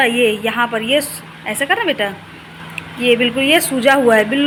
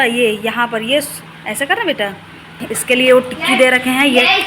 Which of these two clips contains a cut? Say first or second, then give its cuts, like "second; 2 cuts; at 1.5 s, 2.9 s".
second; 1 cut; at 2.7 s